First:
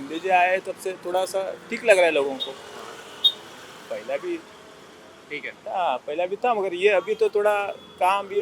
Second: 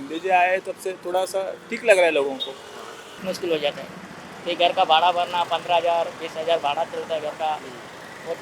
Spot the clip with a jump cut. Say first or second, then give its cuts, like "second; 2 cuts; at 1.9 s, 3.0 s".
second; 1 cut; at 3.2 s